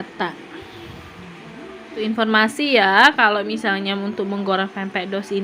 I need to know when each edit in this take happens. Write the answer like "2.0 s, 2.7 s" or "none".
2.0 s